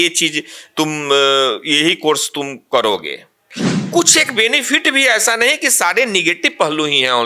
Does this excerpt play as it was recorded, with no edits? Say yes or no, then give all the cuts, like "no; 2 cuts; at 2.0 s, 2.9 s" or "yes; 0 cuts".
no; 1 cut; at 3.7 s